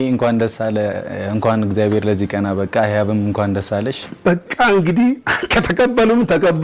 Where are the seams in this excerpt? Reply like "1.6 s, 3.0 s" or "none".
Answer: 4.0 s